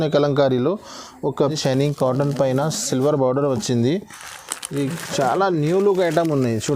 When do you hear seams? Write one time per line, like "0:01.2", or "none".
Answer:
0:01.3